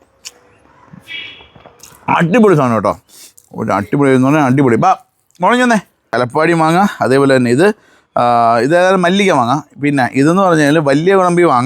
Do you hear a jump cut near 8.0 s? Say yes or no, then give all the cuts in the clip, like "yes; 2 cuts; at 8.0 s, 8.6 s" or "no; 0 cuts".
no; 1 cut; at 6.0 s